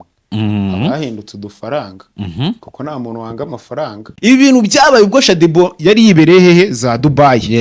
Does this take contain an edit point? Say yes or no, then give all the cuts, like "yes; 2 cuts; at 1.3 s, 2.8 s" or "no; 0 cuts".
yes; 1 cut; at 4.1 s